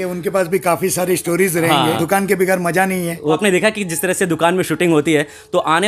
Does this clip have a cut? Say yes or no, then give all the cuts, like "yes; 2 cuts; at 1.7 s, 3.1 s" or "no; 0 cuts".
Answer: yes; 2 cuts; at 2.0 s, 3.4 s